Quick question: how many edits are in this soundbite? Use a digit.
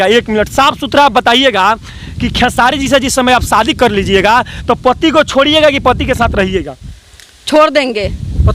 0